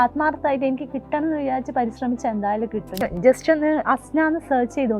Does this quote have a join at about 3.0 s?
yes; 1 cut; at 3.0 s

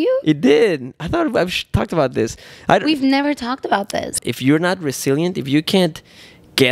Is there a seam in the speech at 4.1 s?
yes; 1 cut; at 4.1 s

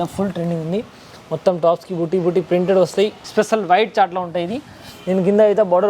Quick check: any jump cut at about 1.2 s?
no; 1 cut; at 3.2 s

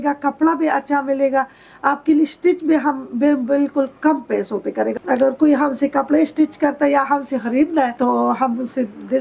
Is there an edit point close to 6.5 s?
no; 2 cuts; at 5.0 s, 7.9 s

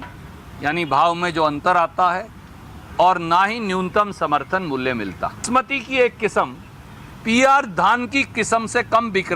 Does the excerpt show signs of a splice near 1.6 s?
no; 1 cut; at 5.4 s

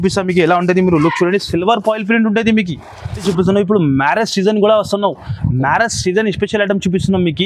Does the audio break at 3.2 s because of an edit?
yes; 1 cut; at 3.2 s

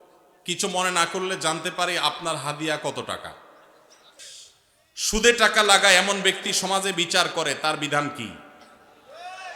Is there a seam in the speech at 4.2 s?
yes; 1 cut; at 4.2 s

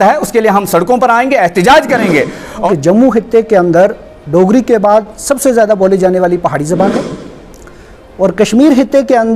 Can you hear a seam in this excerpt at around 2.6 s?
yes; 1 cut; at 2.6 s

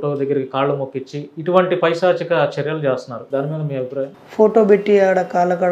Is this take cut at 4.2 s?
yes; 2 cuts; at 3.1 s, 4.2 s

